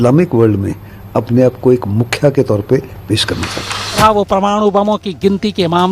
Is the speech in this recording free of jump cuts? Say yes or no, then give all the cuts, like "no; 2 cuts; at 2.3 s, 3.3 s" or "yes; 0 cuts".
no; 1 cut; at 4.0 s